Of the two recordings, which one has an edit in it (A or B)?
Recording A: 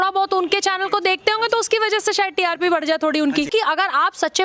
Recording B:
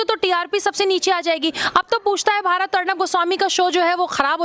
A